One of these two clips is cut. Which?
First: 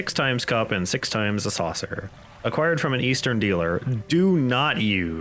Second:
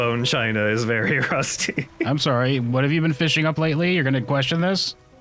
second; 1 cut; at 2.1 s

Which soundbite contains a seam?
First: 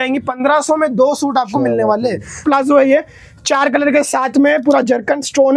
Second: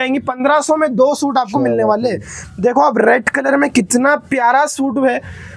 first; 1 cut; at 2.4 s

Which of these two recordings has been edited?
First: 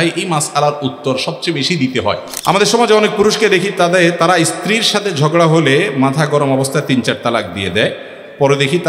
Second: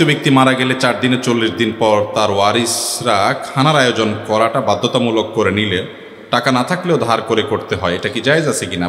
first; 1 cut; at 2.3 s

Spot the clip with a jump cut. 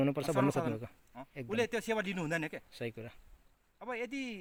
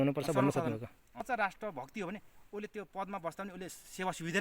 second; 1 cut; at 1.3 s

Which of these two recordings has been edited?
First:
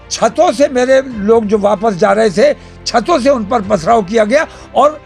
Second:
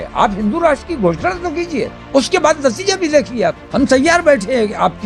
second; 2 cuts; at 2.0 s, 3.6 s

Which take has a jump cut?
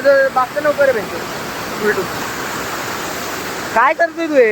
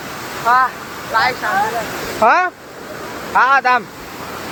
first; 1 cut; at 2.2 s

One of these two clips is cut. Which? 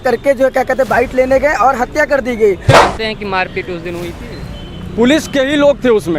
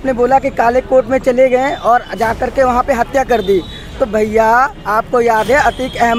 first; 1 cut; at 2.7 s

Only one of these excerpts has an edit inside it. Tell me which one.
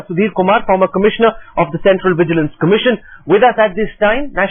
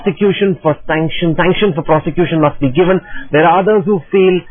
first; 1 cut; at 1.5 s

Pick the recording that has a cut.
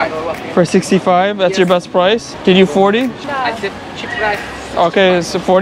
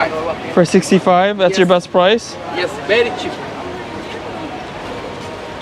first; 2 cuts; at 2.3 s, 3.2 s

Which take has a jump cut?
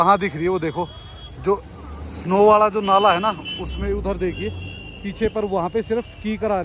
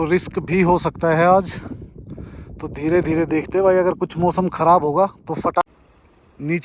second; 1 cut; at 5.7 s

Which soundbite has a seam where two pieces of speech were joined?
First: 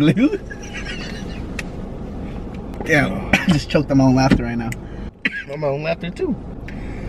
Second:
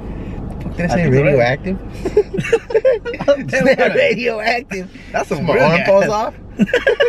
first; 2 cuts; at 2.7 s, 5.0 s

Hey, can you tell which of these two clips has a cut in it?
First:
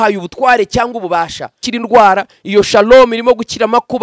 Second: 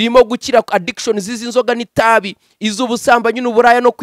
first; 1 cut; at 1.7 s

